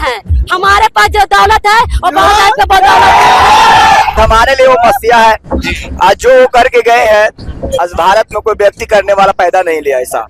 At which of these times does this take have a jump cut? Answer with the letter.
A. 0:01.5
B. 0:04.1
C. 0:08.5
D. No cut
B